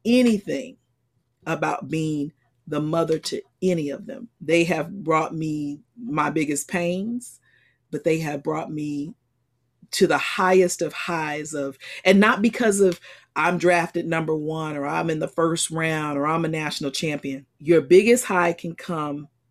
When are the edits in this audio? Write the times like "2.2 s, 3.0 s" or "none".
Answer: 4.3 s, 17.5 s